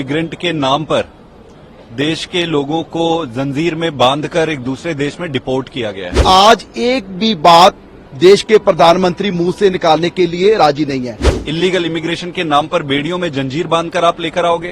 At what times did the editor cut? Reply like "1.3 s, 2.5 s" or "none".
6.2 s, 11.3 s